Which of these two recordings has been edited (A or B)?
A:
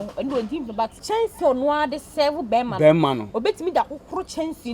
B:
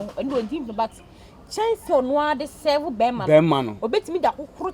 A